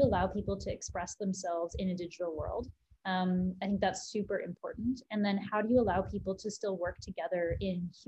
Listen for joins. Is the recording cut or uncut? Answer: uncut